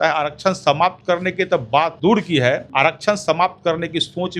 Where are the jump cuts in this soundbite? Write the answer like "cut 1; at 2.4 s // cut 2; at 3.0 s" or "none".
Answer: cut 1; at 1.9 s // cut 2; at 2.7 s